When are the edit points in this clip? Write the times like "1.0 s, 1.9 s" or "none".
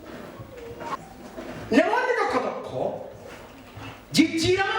1.0 s